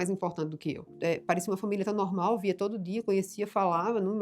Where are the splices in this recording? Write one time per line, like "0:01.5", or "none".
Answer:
0:00.9